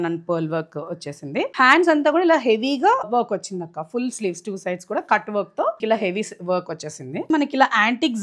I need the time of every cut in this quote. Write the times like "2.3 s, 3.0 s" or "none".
1.5 s, 3.1 s, 5.8 s, 7.3 s